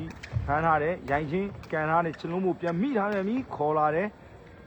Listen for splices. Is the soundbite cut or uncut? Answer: uncut